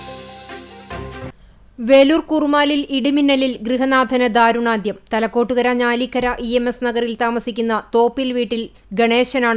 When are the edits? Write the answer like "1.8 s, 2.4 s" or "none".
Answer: none